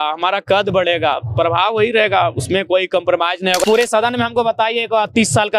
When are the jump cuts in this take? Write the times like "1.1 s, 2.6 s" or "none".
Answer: 3.6 s